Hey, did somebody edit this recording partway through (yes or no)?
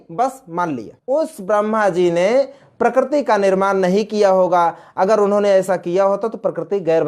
yes